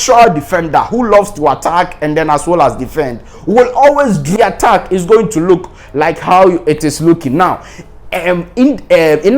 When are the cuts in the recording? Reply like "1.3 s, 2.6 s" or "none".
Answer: 4.3 s